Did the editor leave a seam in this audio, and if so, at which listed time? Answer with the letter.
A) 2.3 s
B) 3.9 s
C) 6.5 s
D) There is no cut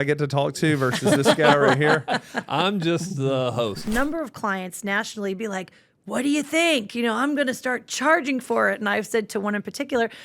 B